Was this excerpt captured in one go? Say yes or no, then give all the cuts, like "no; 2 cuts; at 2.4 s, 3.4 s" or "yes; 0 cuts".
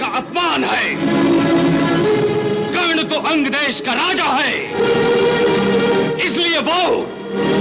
yes; 0 cuts